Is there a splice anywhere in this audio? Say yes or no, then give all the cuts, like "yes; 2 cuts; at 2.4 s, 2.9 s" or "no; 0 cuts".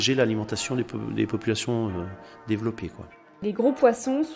yes; 1 cut; at 3.3 s